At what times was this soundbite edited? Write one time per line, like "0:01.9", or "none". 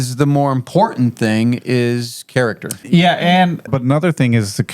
0:02.7
0:03.7